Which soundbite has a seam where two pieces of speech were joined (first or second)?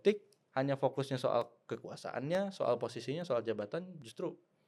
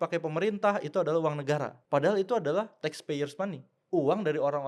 second